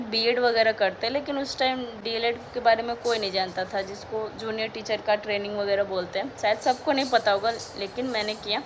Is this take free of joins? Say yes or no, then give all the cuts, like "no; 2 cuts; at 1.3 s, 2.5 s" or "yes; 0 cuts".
yes; 0 cuts